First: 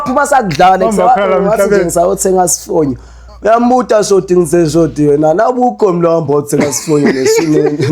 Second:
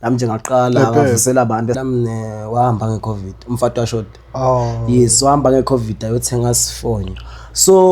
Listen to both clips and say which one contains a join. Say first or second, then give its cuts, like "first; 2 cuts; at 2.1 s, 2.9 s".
second; 1 cut; at 1.8 s